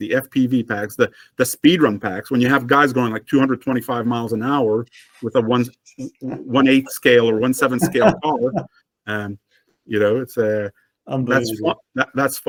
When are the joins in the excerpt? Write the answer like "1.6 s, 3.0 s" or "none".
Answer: none

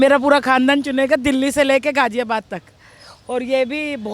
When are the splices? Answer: none

